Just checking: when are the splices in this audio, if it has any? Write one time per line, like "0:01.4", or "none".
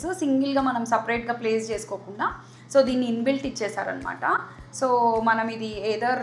none